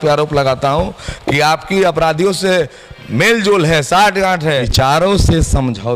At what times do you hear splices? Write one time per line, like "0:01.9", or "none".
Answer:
0:04.7